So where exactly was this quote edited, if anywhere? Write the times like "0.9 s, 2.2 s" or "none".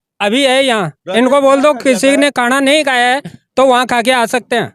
none